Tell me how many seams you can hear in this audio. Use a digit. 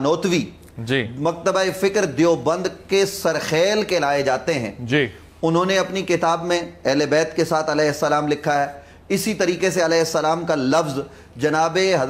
0